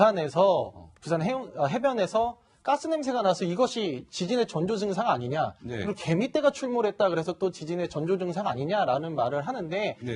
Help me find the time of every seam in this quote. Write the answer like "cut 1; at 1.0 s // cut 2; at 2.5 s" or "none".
none